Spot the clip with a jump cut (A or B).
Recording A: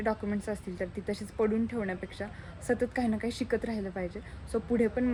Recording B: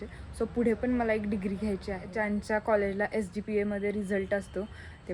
B